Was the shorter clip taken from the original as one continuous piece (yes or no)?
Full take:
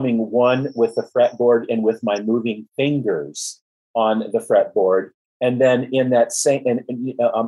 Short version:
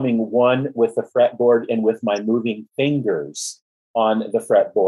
yes